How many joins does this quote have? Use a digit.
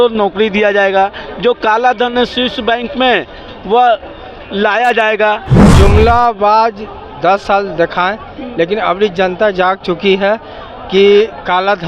1